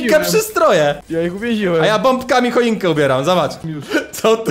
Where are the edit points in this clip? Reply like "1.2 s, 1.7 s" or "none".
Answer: 1.0 s, 3.6 s